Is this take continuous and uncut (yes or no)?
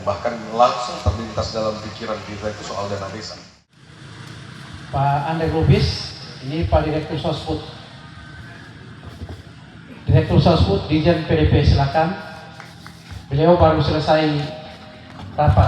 no